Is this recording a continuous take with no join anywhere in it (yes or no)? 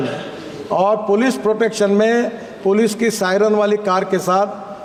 yes